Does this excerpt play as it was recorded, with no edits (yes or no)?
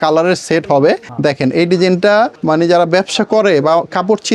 yes